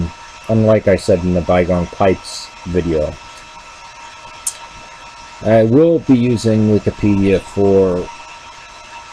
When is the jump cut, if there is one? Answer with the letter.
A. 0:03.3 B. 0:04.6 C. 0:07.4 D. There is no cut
A